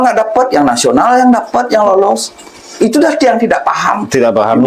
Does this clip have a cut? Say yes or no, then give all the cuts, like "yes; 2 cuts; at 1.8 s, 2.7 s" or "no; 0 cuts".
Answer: no; 0 cuts